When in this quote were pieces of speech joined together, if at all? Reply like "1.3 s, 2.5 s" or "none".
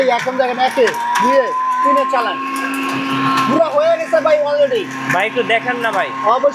none